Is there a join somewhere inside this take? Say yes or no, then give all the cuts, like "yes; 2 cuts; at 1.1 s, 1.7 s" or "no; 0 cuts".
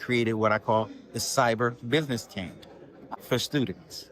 yes; 1 cut; at 3.1 s